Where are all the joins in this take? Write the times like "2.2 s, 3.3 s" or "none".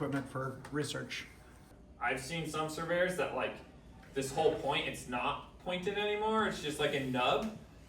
1.6 s